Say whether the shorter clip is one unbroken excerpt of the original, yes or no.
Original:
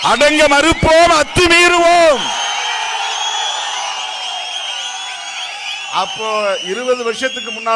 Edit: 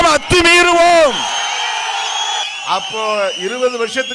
no